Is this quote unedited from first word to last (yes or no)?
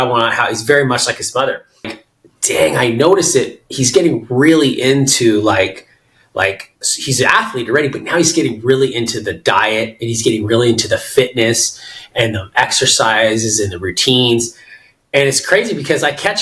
no